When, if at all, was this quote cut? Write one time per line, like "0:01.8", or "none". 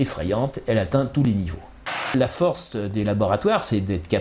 0:02.1

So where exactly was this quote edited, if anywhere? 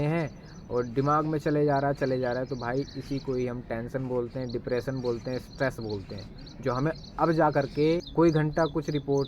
0:08.1

